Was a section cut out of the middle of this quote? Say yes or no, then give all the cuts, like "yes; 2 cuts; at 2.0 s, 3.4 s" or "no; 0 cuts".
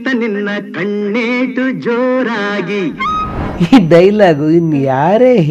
yes; 1 cut; at 3.5 s